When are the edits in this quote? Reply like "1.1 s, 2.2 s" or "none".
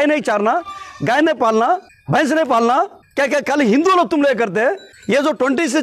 1.9 s, 3.0 s, 4.9 s